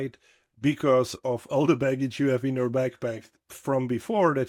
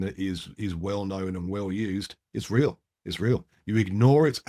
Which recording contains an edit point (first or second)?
first